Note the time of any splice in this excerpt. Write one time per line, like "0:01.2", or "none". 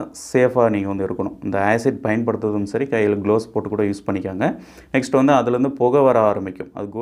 none

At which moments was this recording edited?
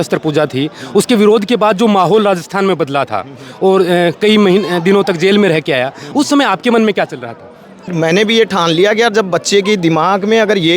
0:07.9

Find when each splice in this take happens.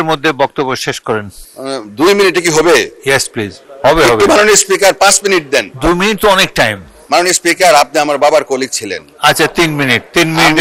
none

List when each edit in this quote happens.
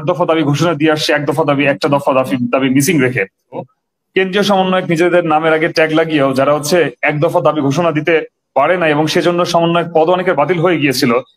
0:03.6

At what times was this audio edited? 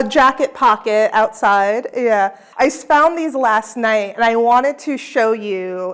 0:02.4

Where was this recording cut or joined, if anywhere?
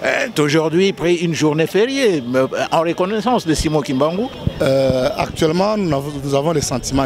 0:04.4

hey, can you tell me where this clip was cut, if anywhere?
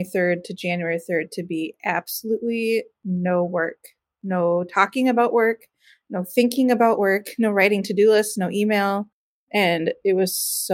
0:09.5

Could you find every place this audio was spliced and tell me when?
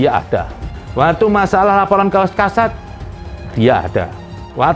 none

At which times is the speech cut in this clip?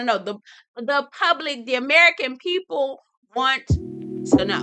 0:03.6

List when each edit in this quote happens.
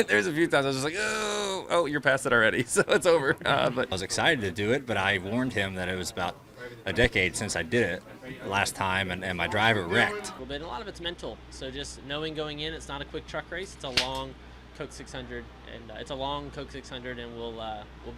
0:04.0
0:10.4

